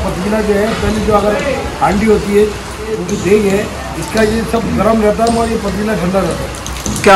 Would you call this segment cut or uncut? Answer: cut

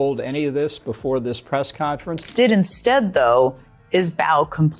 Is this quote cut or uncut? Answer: cut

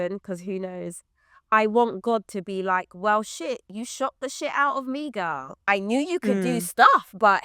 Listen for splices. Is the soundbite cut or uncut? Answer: cut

